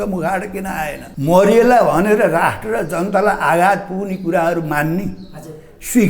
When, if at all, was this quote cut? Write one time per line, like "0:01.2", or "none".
0:01.0